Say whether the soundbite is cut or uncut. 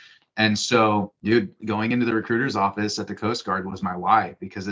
cut